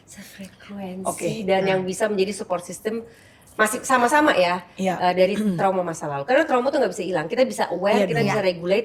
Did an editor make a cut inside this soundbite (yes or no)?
no